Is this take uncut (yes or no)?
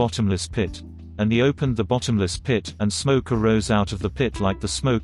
no